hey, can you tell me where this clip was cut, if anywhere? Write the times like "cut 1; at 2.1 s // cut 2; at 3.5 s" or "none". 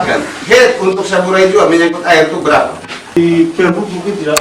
cut 1; at 3.2 s